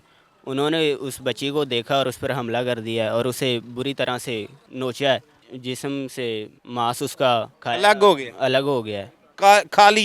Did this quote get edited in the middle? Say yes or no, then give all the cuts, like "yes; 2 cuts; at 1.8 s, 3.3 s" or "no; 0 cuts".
yes; 4 cuts; at 4.6 s, 5.5 s, 6.6 s, 7.5 s